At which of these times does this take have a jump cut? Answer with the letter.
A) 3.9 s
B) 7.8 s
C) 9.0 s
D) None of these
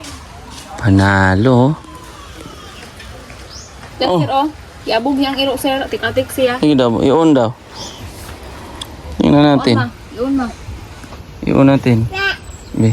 A